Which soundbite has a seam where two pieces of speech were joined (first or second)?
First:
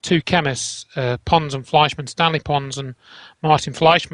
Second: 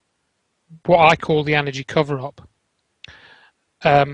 second